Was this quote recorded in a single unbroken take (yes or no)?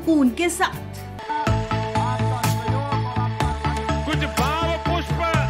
no